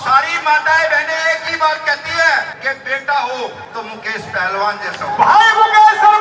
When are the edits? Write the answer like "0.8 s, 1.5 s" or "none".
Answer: 2.5 s, 3.6 s